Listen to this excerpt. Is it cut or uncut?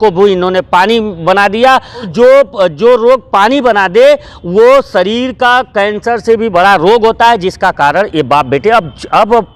cut